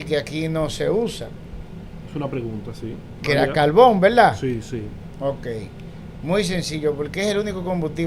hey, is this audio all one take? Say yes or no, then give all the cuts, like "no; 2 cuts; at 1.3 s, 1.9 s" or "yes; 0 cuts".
yes; 0 cuts